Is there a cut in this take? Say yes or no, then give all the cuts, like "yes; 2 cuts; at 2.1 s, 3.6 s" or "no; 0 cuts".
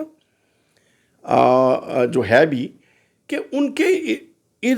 no; 0 cuts